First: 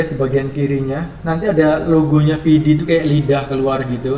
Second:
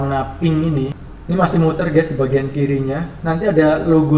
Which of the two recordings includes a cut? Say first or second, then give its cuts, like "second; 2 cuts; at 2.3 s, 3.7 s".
second; 1 cut; at 1.1 s